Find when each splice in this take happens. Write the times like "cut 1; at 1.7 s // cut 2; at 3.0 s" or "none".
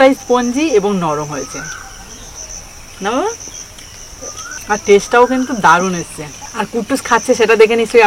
none

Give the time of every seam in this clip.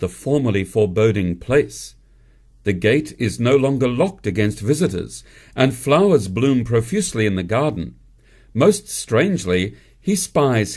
cut 1; at 8.9 s

